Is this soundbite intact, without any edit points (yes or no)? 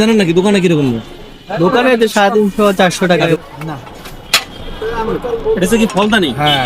no